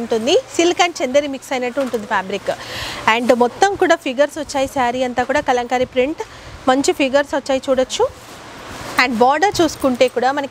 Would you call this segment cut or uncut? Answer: uncut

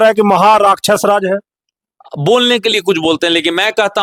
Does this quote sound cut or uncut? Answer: uncut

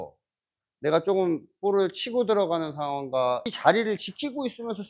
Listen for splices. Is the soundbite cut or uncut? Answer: cut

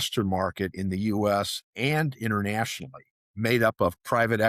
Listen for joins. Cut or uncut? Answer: uncut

